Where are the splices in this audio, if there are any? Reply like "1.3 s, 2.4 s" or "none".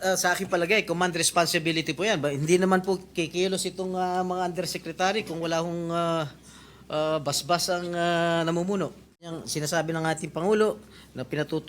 9.4 s